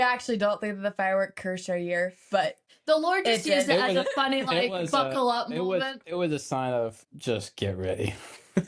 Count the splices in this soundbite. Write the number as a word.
two